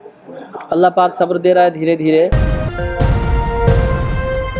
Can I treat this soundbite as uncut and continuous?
no; 1 cut; at 2.4 s

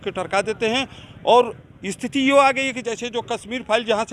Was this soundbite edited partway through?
no; 0 cuts

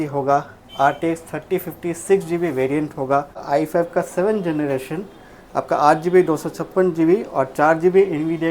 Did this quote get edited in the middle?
yes; 1 cut; at 3.4 s

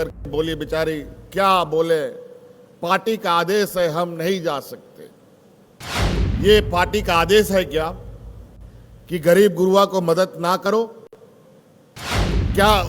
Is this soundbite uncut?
no; 2 cuts; at 6.0 s, 12.0 s

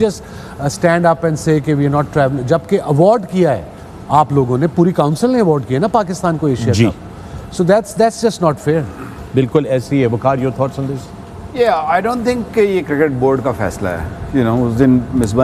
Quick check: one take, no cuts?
yes; 0 cuts

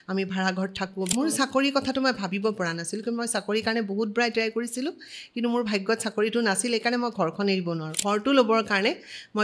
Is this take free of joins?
no; 2 cuts; at 1.1 s, 8.0 s

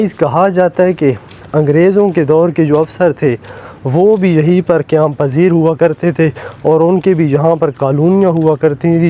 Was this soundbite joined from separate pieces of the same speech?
no; 0 cuts

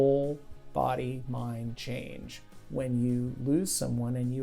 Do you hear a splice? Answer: no; 0 cuts

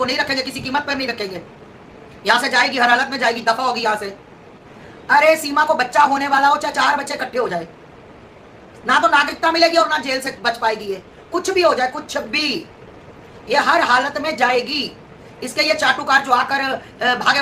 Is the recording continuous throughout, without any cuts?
yes; 0 cuts

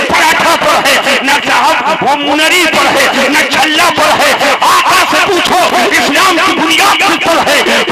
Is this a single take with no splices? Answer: yes; 0 cuts

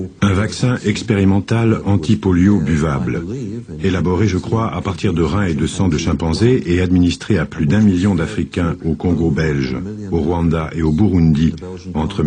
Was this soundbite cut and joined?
no; 0 cuts

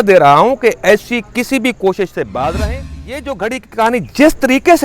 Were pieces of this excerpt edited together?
yes; 1 cut; at 3.2 s

